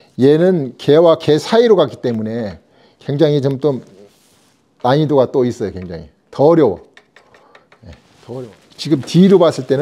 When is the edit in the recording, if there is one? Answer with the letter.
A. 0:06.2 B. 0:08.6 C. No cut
B